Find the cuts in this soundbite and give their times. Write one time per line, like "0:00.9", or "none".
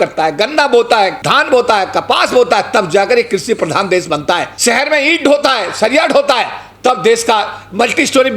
0:01.2
0:04.5